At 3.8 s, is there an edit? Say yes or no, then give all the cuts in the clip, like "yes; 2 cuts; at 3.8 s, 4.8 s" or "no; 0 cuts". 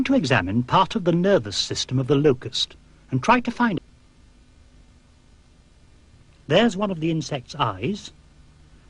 no; 0 cuts